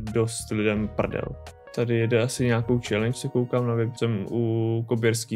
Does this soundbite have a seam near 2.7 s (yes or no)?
no